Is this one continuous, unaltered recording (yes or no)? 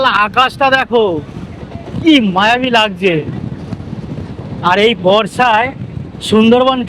yes